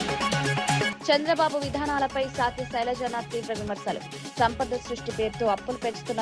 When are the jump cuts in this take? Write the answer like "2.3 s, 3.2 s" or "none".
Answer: none